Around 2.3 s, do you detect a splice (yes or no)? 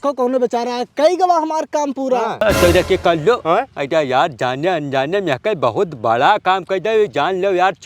yes